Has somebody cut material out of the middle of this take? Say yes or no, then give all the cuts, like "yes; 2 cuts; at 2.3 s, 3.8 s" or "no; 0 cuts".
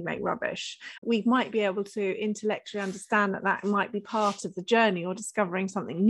yes; 1 cut; at 0.9 s